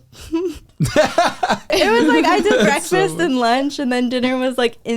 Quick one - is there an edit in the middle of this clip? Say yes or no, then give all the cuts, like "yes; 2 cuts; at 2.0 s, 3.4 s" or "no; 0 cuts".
yes; 1 cut; at 1.7 s